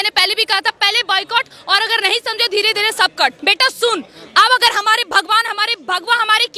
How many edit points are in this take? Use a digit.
1